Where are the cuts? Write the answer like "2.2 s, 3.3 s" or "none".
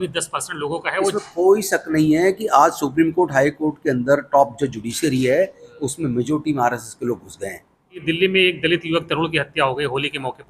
8.0 s